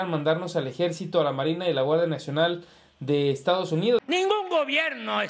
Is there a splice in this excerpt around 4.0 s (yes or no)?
yes